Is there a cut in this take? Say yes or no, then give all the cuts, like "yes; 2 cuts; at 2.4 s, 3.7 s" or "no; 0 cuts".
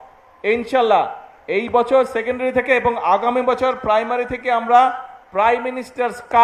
no; 0 cuts